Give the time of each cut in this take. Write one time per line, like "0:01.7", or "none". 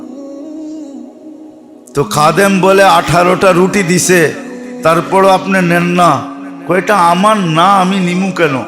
0:01.9